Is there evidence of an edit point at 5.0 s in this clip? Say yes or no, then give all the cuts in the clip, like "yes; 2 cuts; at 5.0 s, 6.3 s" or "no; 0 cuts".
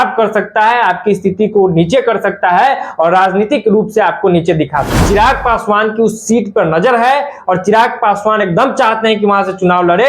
yes; 1 cut; at 5.0 s